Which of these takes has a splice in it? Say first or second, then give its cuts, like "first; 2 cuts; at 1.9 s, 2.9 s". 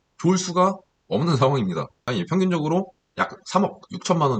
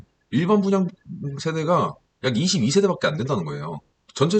first; 1 cut; at 2.0 s